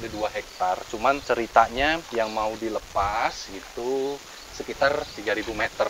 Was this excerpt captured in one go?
yes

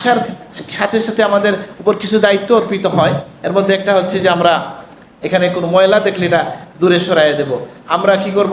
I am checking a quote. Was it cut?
no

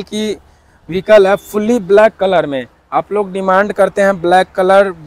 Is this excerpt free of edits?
yes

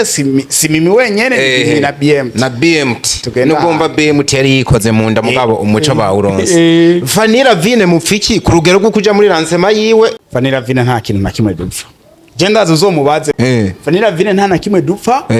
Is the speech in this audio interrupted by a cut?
yes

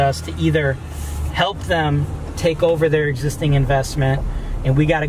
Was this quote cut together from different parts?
no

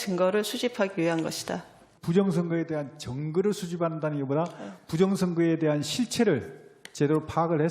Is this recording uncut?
no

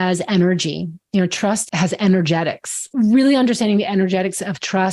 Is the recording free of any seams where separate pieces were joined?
no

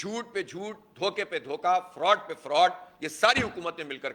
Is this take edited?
no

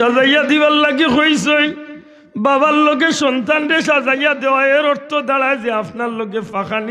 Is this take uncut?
yes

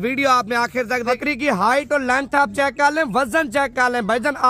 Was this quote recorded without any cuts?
no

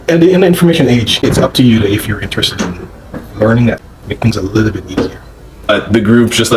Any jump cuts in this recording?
yes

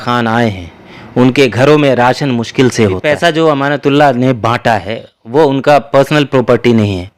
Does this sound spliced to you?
yes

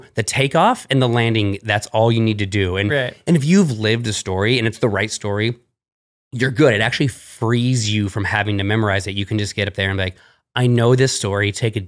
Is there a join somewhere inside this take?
no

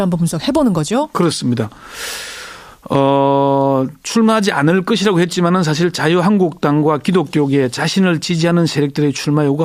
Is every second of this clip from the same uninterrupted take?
yes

